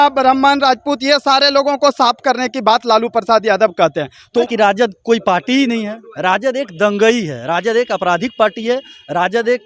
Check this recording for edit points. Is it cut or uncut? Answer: cut